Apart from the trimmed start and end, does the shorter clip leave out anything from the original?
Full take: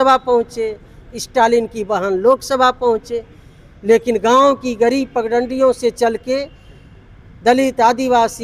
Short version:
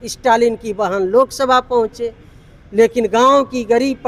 no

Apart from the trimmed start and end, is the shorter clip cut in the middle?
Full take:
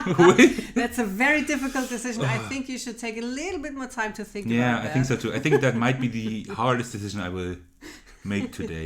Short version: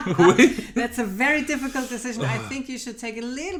no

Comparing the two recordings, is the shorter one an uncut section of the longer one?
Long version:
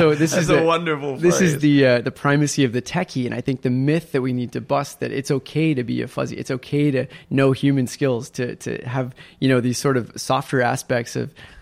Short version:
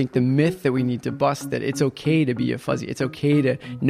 yes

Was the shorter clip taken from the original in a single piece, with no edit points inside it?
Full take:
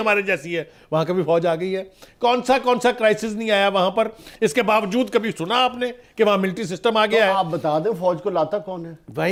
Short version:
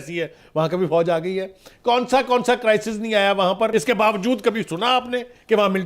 no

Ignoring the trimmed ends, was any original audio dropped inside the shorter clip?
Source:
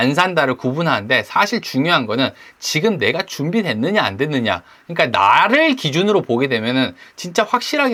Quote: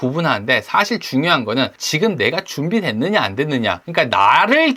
yes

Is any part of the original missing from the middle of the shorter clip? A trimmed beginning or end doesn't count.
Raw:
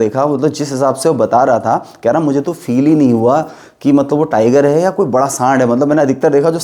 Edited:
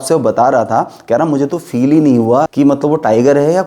yes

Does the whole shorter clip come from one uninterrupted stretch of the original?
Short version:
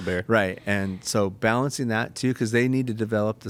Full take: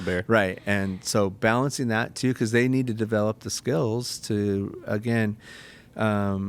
yes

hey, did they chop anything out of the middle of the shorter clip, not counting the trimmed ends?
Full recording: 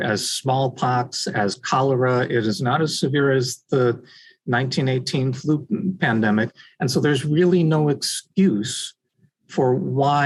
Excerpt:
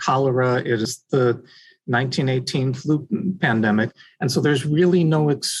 yes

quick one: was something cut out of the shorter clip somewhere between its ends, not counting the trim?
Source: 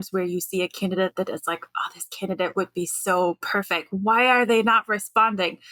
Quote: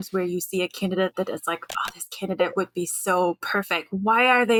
no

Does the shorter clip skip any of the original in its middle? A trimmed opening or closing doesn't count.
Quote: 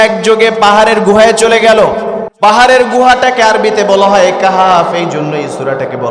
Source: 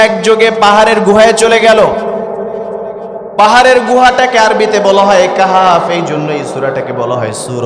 yes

